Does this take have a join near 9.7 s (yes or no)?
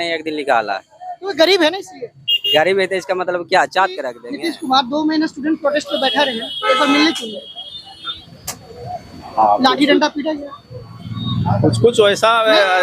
no